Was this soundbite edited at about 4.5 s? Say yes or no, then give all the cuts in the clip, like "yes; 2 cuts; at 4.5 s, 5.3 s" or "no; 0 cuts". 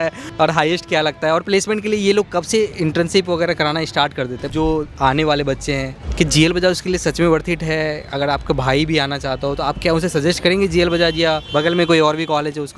yes; 2 cuts; at 4.5 s, 11.4 s